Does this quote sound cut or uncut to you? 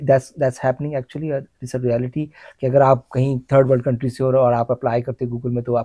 uncut